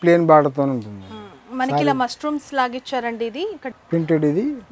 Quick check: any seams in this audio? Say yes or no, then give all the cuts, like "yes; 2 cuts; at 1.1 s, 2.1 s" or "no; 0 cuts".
yes; 1 cut; at 3.8 s